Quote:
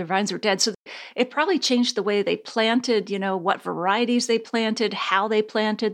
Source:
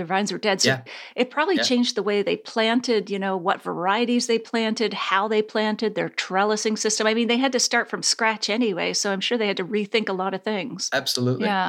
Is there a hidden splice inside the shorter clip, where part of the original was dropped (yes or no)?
no